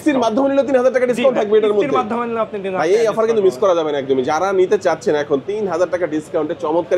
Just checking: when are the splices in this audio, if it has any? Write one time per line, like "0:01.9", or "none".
none